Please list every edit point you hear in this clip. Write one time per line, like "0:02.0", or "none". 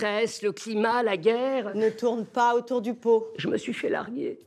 0:01.7